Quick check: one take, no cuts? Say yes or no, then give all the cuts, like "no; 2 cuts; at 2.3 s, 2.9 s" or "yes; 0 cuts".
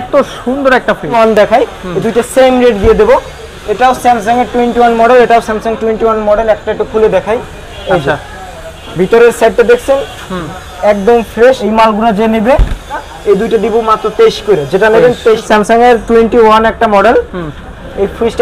no; 4 cuts; at 1.1 s, 11.6 s, 13.0 s, 15.4 s